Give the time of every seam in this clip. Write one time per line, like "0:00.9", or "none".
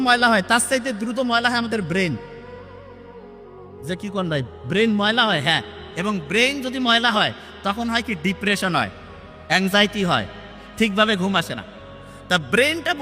none